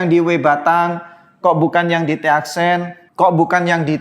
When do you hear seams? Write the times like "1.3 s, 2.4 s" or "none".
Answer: 3.0 s